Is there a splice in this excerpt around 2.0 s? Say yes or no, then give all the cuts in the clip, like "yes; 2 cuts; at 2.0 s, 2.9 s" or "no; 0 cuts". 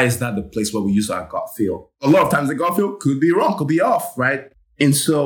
yes; 1 cut; at 2.0 s